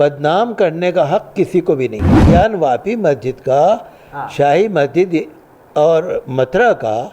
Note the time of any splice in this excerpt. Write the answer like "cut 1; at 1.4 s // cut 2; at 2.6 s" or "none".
cut 1; at 2.2 s